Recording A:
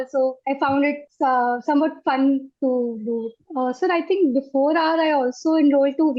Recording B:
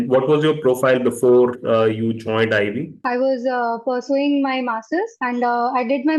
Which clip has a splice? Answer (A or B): A